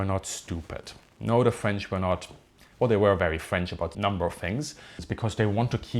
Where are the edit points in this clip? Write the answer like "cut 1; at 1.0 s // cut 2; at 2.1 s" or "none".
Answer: cut 1; at 3.9 s // cut 2; at 5.1 s